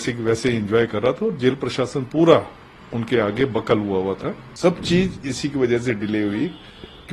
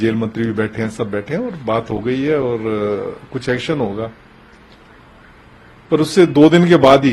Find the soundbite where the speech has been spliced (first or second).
first